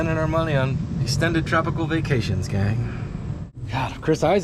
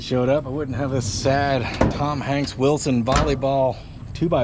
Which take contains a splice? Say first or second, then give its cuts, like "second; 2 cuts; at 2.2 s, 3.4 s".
first; 2 cuts; at 0.9 s, 3.6 s